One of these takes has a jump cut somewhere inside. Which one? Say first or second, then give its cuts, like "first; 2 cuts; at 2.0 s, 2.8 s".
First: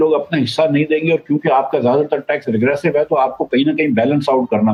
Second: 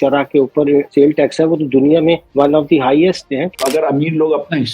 second; 3 cuts; at 0.9 s, 2.3 s, 3.3 s